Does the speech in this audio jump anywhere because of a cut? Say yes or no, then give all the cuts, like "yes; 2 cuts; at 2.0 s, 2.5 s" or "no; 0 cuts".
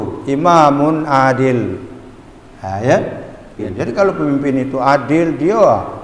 yes; 1 cut; at 3.7 s